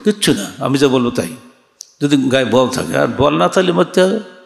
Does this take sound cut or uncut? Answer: uncut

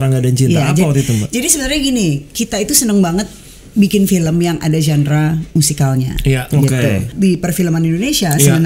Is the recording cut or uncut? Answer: cut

